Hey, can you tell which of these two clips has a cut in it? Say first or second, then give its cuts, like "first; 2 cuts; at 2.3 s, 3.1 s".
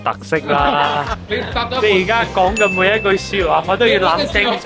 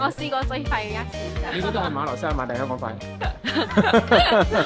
first; 1 cut; at 1.1 s